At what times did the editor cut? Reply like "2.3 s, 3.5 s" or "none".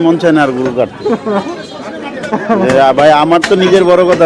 none